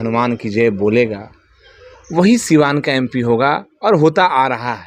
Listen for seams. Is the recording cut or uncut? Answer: uncut